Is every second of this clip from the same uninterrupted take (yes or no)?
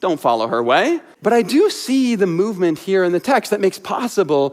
no